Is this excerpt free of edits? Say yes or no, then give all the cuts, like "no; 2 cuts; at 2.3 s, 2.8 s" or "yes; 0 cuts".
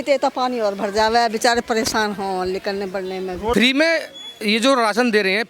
no; 1 cut; at 3.5 s